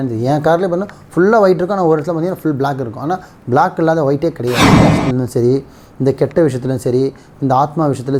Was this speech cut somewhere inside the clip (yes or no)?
yes